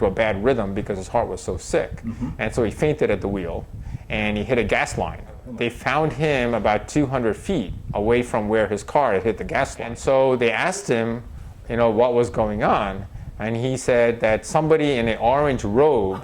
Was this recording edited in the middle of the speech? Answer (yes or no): yes